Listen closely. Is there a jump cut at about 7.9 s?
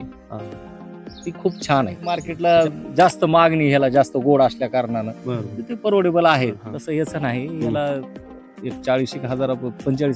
no; 2 cuts; at 2.3 s, 6.7 s

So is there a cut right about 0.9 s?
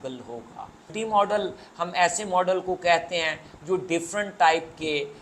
yes; 1 cut; at 0.9 s

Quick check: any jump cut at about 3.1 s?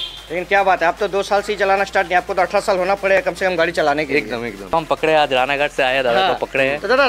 no; 1 cut; at 4.7 s

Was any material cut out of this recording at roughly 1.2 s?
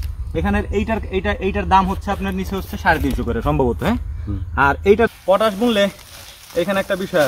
no; 1 cut; at 5.1 s

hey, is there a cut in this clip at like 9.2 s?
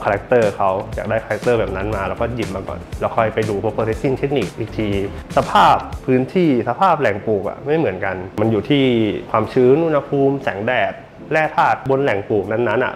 yes; 4 cuts; at 5.2 s, 8.2 s, 9.2 s, 11.8 s

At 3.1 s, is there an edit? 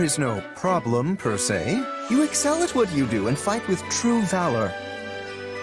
no; 1 cut; at 4.7 s

